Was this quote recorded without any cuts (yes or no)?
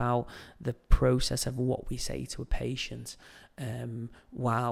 yes